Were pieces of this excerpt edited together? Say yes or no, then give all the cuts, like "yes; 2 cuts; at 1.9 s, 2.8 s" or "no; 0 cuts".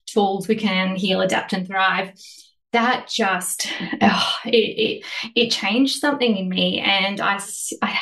no; 0 cuts